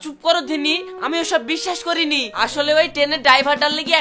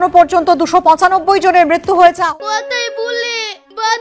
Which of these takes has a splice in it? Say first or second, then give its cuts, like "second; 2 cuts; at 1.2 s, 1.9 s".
second; 1 cut; at 2.2 s